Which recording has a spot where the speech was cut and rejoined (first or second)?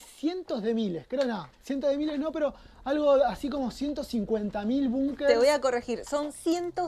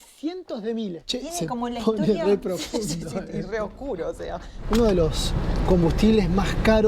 second